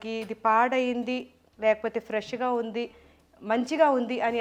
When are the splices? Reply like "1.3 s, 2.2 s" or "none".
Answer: none